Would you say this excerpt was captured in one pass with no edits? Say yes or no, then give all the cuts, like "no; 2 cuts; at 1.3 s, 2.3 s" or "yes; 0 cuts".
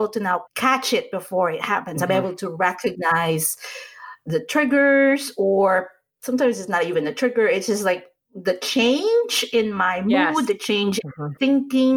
yes; 0 cuts